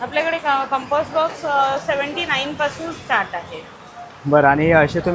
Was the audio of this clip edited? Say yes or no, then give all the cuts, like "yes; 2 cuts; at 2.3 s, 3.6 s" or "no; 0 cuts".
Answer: no; 0 cuts